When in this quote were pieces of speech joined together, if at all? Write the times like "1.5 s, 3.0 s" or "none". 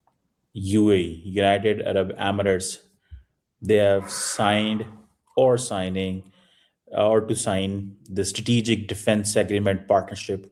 none